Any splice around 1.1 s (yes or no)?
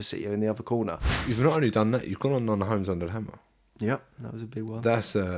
yes